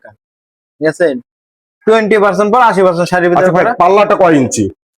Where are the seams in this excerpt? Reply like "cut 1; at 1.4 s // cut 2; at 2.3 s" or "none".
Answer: none